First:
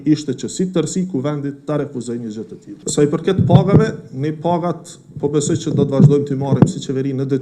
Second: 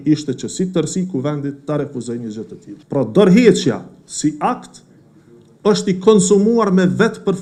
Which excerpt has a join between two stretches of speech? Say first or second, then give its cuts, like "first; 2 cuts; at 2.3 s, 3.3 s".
first; 1 cut; at 2.7 s